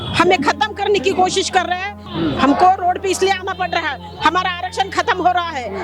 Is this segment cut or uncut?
cut